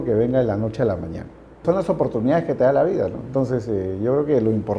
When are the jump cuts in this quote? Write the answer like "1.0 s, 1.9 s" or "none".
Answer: 1.6 s